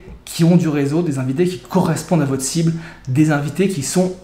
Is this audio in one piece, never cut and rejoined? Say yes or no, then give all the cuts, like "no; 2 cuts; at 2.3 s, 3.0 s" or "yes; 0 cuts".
yes; 0 cuts